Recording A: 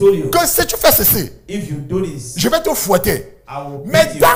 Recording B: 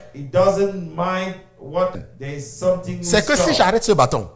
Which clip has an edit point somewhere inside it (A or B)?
B